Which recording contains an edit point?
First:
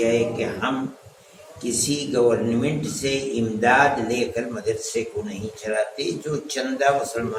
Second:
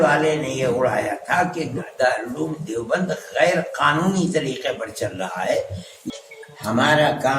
second; 1 cut; at 6.0 s

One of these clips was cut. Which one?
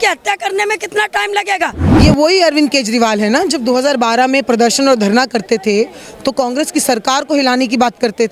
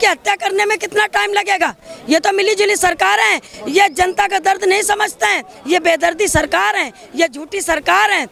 first; 1 cut; at 1.8 s

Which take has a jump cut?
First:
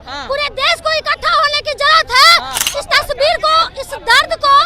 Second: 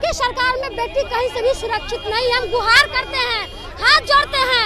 first; 1 cut; at 2.6 s

